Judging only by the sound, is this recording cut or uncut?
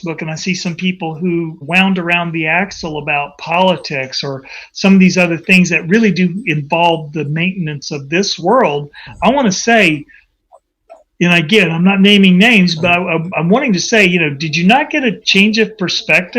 cut